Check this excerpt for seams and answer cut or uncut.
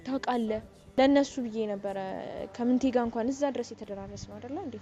cut